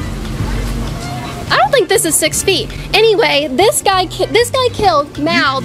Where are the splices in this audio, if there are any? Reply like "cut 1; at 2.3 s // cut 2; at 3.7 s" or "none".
none